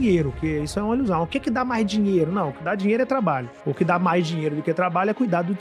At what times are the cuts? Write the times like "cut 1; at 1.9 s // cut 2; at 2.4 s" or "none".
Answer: none

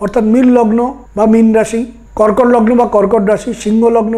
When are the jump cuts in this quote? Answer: cut 1; at 1.0 s // cut 2; at 2.0 s

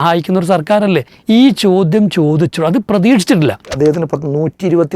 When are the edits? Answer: cut 1; at 1.1 s // cut 2; at 3.7 s

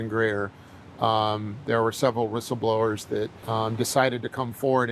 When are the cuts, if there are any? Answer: cut 1; at 3.4 s

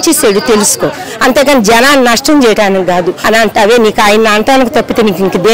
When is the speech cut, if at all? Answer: cut 1; at 3.2 s

